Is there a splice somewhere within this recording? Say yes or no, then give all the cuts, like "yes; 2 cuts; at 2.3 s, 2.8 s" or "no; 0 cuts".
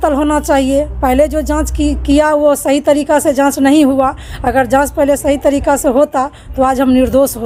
no; 0 cuts